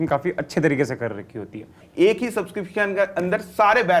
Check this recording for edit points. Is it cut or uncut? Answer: cut